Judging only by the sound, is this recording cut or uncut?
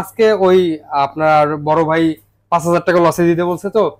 uncut